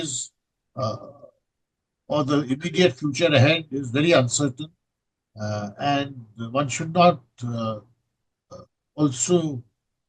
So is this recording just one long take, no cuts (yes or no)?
yes